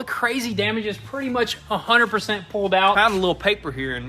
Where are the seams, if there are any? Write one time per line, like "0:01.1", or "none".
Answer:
0:03.0